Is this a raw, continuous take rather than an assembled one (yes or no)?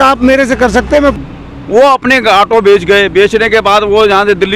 no